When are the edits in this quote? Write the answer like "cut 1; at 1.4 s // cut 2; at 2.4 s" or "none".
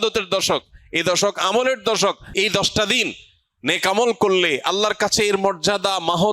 cut 1; at 2.2 s